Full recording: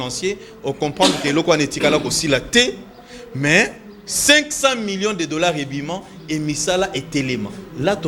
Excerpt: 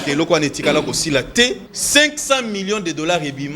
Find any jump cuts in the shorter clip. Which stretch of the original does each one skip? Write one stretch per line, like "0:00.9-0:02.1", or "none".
0:02.9-0:04.1